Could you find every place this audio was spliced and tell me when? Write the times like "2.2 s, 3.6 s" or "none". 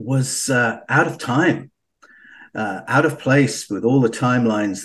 none